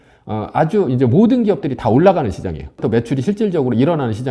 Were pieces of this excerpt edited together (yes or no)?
yes